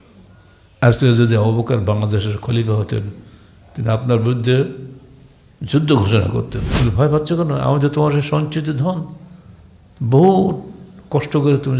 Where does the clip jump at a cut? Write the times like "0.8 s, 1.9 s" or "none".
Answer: 6.6 s

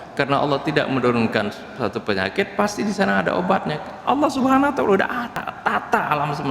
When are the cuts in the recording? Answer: 5.3 s

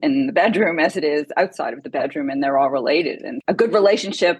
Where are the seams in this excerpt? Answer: 3.3 s

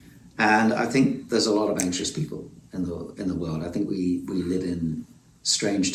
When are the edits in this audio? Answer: none

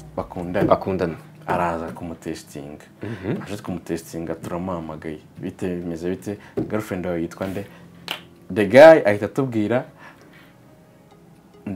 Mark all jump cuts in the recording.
none

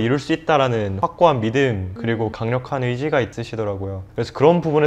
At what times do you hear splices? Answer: 0.9 s, 2.2 s, 3.4 s

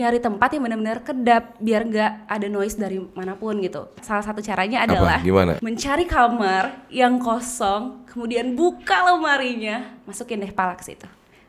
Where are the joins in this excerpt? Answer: 4.0 s, 5.7 s

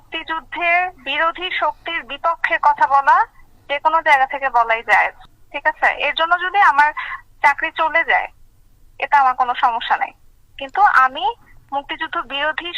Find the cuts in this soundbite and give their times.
1.0 s

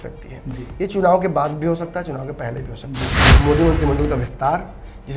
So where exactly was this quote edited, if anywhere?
3.2 s

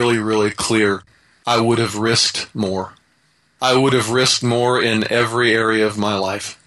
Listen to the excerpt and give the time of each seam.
1.0 s, 3.5 s

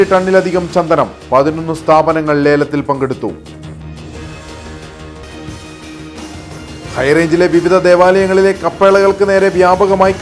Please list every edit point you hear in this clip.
6.9 s

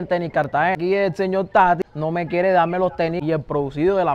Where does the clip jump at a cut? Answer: 0.8 s, 3.2 s

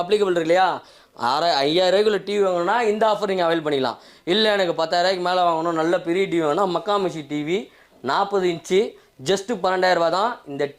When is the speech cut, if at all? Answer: none

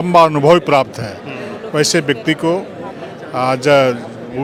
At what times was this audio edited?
none

